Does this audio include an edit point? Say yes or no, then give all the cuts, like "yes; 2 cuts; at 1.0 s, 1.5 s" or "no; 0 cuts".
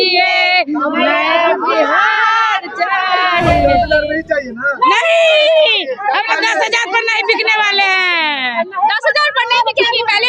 no; 0 cuts